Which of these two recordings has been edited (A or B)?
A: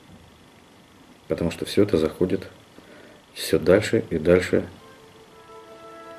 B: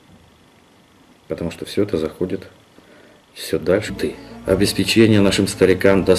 A